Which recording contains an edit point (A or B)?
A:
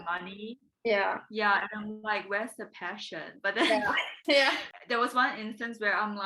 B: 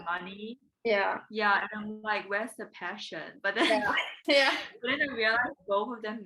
A